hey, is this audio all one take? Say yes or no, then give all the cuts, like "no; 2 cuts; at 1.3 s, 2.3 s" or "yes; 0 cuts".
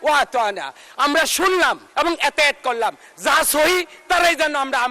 no; 1 cut; at 1.8 s